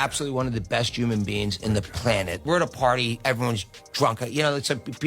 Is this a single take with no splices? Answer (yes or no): no